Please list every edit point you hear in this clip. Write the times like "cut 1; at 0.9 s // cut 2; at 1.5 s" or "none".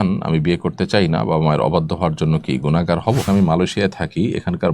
cut 1; at 3.2 s

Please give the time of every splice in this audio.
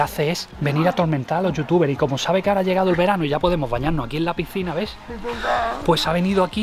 none

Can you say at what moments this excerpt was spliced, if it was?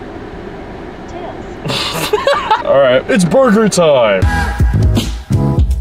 cut 1; at 4.2 s

